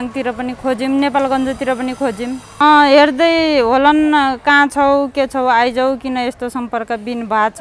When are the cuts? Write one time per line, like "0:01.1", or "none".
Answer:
0:02.5